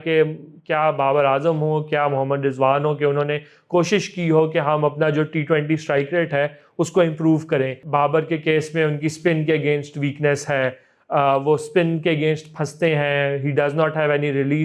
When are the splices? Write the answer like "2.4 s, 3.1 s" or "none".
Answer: 7.8 s